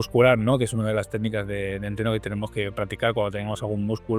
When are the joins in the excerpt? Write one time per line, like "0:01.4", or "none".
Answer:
none